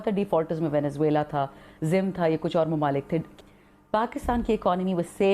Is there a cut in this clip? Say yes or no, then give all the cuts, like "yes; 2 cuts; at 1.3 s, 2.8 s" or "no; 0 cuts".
yes; 1 cut; at 3.3 s